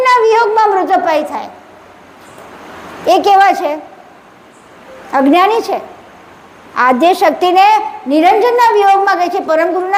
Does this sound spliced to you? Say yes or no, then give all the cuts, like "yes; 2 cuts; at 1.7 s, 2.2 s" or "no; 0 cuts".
no; 0 cuts